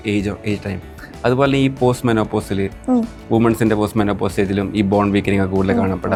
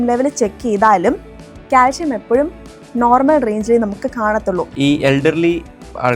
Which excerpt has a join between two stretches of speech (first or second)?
second